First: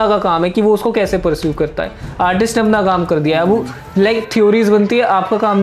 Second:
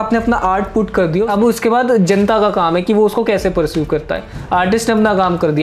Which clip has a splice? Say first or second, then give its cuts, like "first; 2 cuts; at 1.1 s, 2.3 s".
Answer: second; 1 cut; at 1.3 s